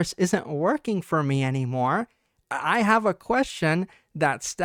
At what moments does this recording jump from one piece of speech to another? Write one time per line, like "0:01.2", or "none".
none